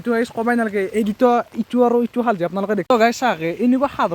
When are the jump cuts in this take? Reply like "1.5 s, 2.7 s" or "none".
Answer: 2.8 s